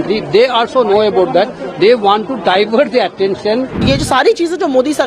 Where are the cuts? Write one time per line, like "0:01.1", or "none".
0:03.8